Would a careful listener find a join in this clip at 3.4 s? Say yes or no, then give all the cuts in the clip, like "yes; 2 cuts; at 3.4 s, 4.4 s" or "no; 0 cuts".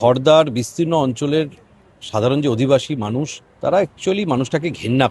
yes; 1 cut; at 3.4 s